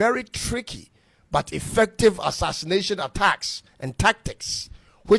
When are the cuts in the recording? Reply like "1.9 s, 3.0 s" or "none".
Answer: none